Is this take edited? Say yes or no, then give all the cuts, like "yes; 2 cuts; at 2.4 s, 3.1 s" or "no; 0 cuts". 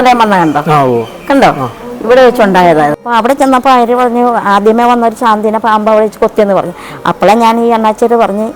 yes; 1 cut; at 3.0 s